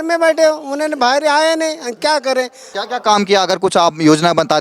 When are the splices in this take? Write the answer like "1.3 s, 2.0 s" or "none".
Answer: 2.6 s